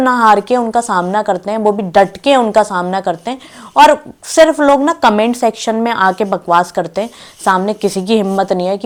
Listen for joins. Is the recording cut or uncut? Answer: uncut